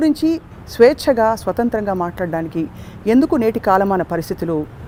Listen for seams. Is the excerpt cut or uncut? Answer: uncut